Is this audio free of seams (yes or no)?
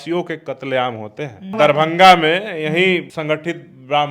no